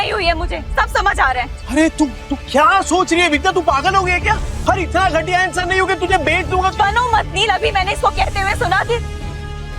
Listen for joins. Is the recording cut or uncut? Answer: cut